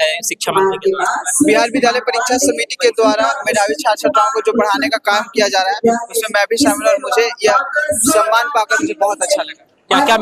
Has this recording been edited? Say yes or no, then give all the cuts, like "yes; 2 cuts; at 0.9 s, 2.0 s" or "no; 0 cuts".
no; 0 cuts